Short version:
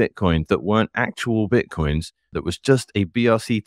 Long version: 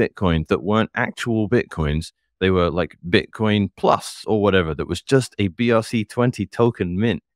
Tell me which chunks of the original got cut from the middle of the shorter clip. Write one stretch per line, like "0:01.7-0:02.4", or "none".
0:02.3-0:04.7